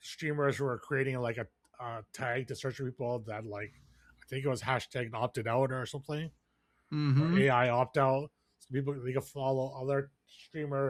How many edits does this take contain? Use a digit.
0